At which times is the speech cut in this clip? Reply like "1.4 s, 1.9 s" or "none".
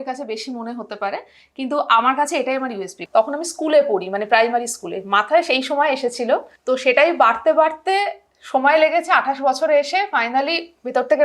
3.0 s, 6.5 s

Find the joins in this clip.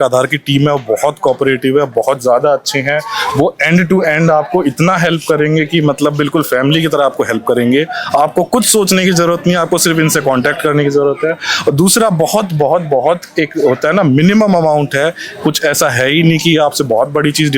none

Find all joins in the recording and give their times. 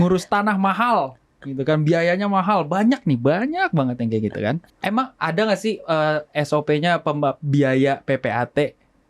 4.7 s

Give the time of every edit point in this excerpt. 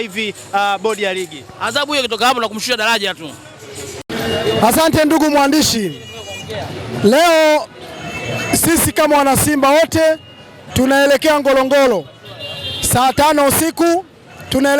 none

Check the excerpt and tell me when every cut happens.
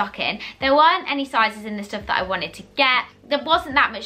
none

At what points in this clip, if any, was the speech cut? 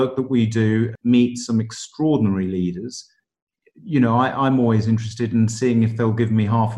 0.9 s

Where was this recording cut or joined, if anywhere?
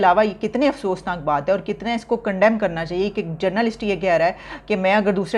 none

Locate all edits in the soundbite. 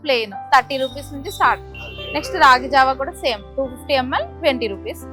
none

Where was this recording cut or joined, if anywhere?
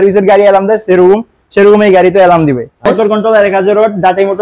3.0 s

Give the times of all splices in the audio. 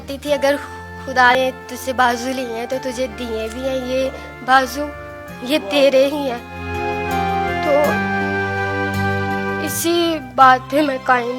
1.3 s

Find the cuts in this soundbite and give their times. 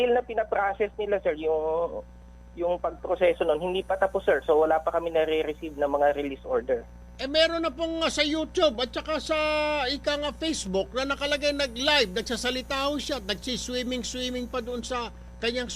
8.8 s

